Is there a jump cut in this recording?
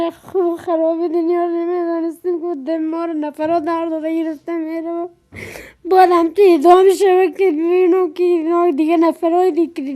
yes; 1 cut; at 8.3 s

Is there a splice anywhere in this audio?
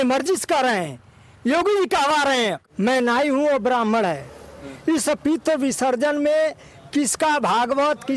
yes; 1 cut; at 2.6 s

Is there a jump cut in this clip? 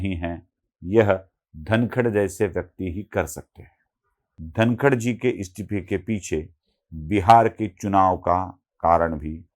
yes; 1 cut; at 4.4 s

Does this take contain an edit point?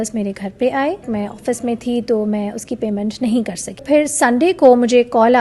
yes; 2 cuts; at 1.1 s, 3.8 s

